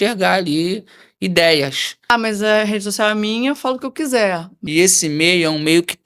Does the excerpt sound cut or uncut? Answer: cut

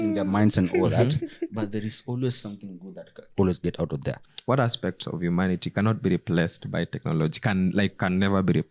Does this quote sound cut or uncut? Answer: cut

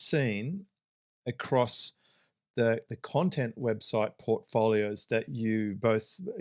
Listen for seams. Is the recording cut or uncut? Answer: uncut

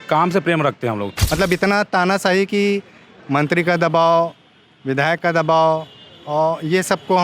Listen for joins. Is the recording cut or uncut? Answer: cut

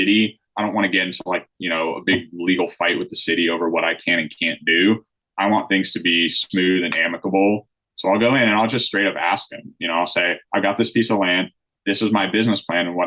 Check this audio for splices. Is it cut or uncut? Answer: uncut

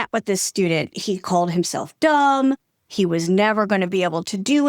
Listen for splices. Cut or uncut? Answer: cut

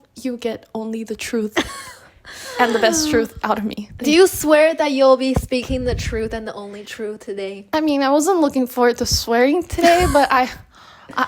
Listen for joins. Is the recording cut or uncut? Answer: uncut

